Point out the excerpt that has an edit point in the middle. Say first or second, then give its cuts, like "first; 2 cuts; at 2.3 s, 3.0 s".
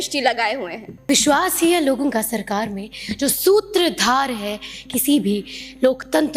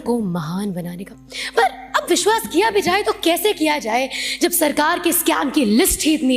first; 1 cut; at 0.9 s